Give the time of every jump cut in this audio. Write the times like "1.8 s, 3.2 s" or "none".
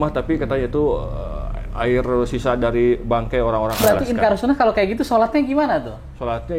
3.8 s

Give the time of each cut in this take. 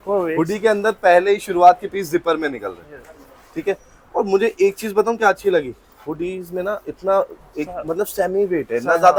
none

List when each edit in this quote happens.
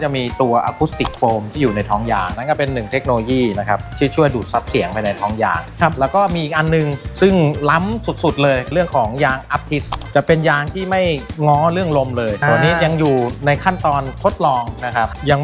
none

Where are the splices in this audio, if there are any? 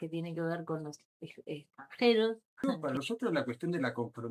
2.8 s

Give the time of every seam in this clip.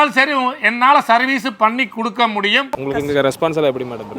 2.7 s

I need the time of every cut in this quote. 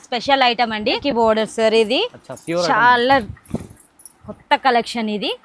1.0 s

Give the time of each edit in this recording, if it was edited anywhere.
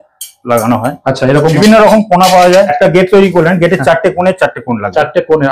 1.5 s, 2.7 s

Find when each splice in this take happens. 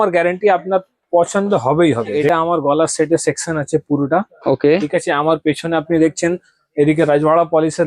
2.2 s

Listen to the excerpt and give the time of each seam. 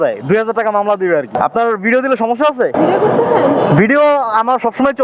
1.3 s, 2.7 s

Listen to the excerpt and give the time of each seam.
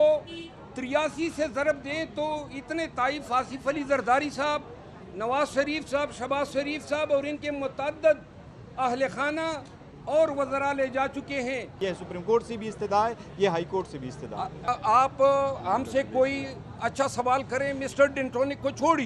11.7 s, 14.6 s

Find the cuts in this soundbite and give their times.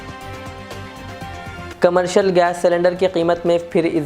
1.7 s

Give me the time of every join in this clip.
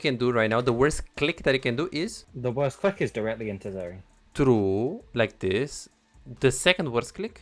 2.1 s

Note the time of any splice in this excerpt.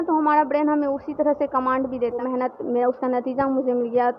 2.2 s

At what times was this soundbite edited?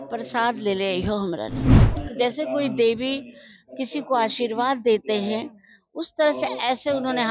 1.9 s

